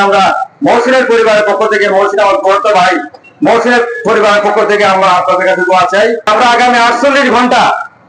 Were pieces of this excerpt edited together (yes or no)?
yes